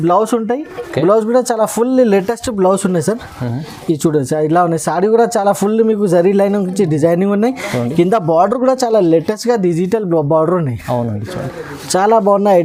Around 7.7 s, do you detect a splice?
no; 0 cuts

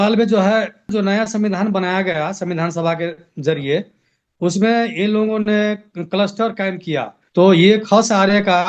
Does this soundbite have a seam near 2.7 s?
no; 2 cuts; at 0.9 s, 7.2 s

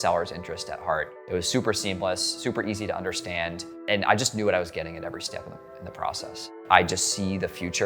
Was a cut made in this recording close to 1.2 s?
yes; 3 cuts; at 1.2 s, 3.7 s, 6.5 s

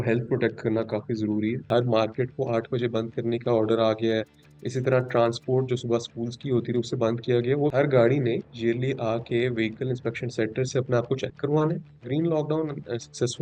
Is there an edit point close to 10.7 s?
no; 3 cuts; at 1.7 s, 7.5 s, 12.0 s

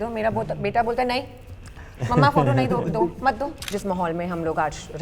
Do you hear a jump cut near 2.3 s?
no; 1 cut; at 3.7 s

